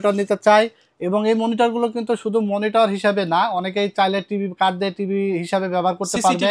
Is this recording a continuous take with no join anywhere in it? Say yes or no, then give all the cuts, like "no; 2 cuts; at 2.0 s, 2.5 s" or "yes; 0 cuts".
yes; 0 cuts